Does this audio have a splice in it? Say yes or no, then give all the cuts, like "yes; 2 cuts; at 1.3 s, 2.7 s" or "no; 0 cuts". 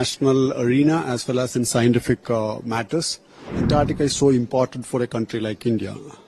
yes; 1 cut; at 3.6 s